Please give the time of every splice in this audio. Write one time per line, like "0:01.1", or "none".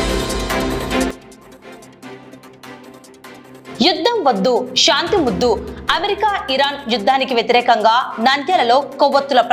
none